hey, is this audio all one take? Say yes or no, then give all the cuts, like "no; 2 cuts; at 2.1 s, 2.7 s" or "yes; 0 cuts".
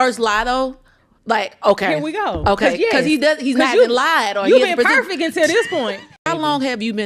no; 1 cut; at 6.1 s